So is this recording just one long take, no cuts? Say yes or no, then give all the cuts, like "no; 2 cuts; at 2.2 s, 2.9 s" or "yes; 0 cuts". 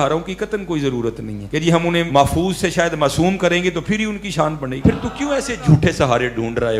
no; 2 cuts; at 1.8 s, 4.7 s